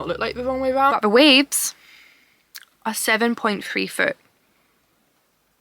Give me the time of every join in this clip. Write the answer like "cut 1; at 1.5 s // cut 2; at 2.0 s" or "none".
cut 1; at 0.9 s